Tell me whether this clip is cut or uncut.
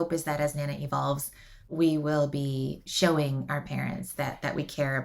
uncut